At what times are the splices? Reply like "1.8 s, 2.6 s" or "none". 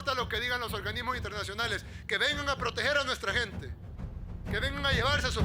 3.6 s